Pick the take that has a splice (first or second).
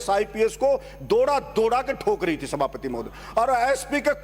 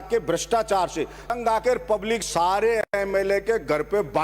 second